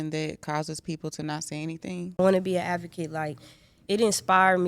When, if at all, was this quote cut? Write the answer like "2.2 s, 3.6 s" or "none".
2.2 s